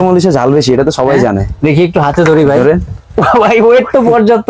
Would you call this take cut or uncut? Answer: uncut